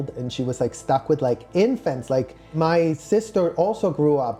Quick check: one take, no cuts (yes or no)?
yes